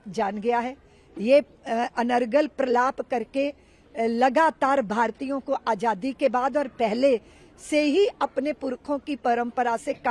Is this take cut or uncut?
uncut